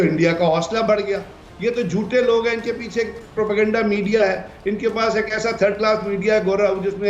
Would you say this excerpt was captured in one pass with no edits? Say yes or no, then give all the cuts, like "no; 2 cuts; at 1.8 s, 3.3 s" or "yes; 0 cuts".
no; 1 cut; at 1.4 s